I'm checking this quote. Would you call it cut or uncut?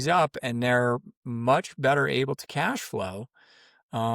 uncut